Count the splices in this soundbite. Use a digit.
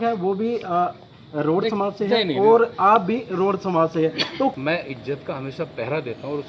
1